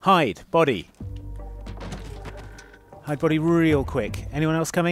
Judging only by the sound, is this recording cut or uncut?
cut